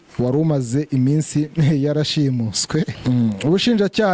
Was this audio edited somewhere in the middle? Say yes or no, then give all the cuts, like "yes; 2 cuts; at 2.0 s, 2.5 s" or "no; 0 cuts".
yes; 1 cut; at 3.0 s